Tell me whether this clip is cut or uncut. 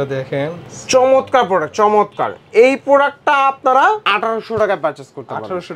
uncut